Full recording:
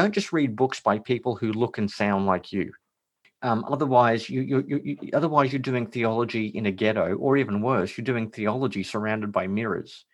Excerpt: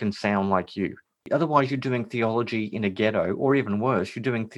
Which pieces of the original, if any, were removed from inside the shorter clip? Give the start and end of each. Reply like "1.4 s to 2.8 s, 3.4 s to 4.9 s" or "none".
2.9 s to 5.0 s